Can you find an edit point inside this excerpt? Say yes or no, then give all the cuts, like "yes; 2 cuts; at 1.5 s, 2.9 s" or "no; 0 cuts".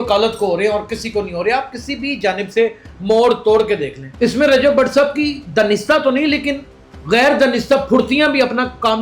yes; 1 cut; at 4.0 s